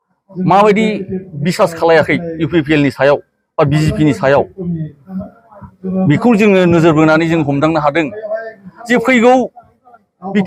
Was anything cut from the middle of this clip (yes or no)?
no